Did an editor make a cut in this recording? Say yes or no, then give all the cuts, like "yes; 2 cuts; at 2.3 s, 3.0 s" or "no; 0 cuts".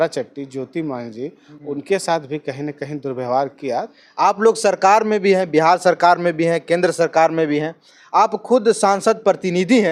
yes; 2 cuts; at 1.5 s, 4.0 s